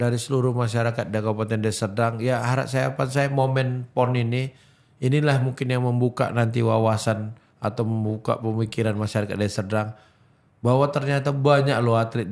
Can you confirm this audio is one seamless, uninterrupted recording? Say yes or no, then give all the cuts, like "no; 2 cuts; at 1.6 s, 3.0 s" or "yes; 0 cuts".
yes; 0 cuts